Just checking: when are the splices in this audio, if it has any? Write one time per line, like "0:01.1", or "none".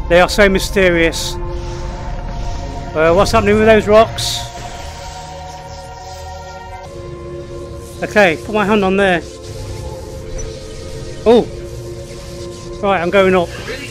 0:06.9

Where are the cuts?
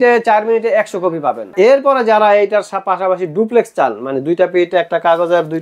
0:01.4

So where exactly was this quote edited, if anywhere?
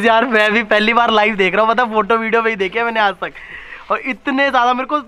none

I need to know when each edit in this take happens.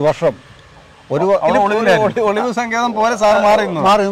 0:02.0

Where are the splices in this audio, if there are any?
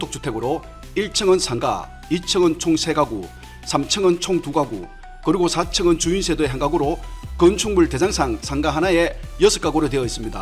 none

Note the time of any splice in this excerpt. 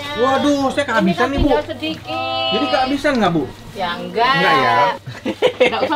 0:05.0

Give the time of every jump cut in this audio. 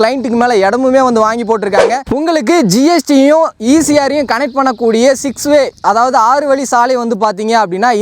0:02.0

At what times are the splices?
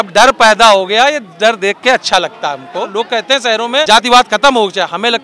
0:02.9
0:03.9

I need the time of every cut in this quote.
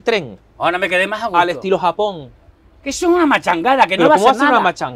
none

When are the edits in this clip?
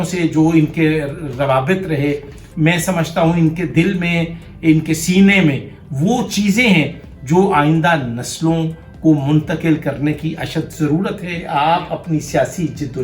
0:11.3

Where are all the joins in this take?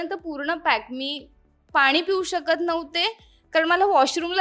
none

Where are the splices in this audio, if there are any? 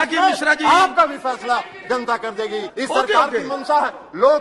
0:02.7

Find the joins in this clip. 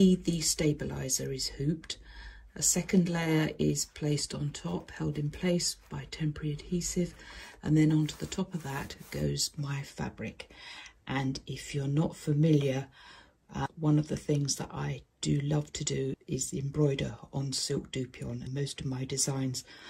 0:13.7
0:16.2
0:18.4

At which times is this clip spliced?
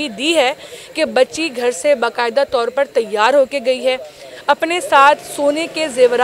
none

